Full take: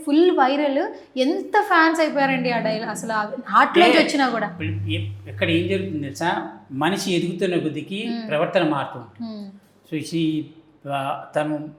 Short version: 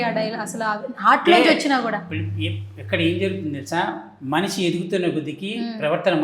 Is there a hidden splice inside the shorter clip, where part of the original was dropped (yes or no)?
no